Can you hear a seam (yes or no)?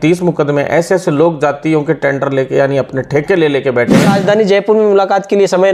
yes